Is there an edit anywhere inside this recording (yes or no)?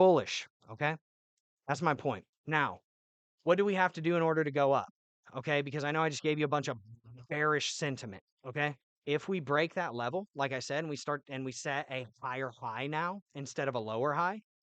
yes